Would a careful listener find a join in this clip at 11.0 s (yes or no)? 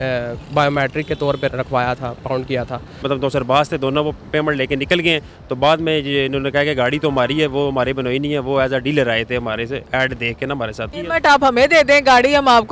yes